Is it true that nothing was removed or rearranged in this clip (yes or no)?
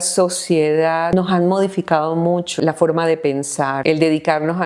no